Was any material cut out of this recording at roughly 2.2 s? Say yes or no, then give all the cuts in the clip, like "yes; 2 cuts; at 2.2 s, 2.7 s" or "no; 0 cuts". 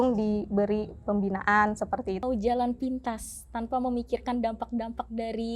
yes; 1 cut; at 2.2 s